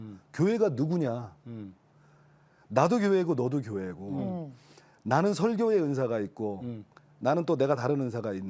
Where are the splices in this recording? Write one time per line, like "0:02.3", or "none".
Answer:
none